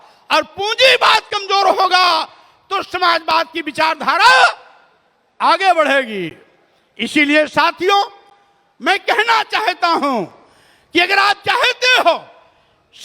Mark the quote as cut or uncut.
uncut